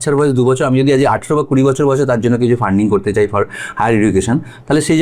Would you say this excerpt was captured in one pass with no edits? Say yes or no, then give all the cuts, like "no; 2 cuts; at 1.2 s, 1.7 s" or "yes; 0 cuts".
yes; 0 cuts